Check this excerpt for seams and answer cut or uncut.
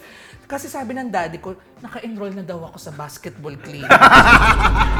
uncut